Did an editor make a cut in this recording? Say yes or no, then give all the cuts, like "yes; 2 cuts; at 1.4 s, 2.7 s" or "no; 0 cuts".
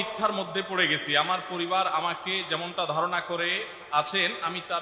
no; 0 cuts